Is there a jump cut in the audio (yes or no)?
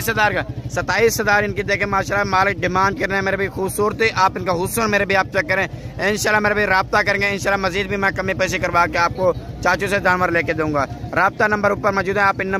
no